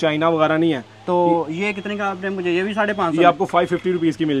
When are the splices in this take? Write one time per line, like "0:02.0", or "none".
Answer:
none